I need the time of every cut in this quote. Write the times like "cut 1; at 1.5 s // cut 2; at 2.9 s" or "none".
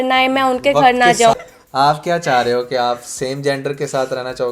cut 1; at 1.4 s